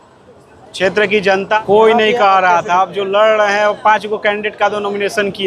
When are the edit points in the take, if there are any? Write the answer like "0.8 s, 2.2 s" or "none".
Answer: 1.6 s